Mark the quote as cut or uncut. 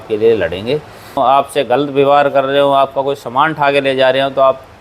cut